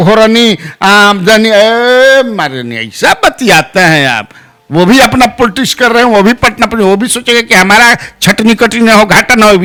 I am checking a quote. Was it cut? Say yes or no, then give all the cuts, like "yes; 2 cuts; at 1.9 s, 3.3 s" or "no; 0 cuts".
no; 0 cuts